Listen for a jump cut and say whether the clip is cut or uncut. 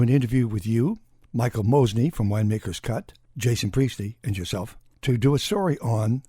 cut